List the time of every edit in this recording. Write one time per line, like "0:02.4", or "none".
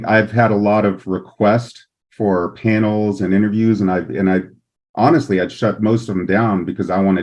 none